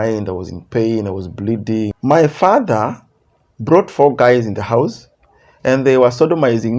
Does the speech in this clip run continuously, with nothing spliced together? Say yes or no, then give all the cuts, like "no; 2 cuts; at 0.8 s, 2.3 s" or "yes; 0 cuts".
no; 1 cut; at 2.0 s